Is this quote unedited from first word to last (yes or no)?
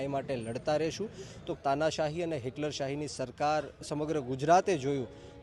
no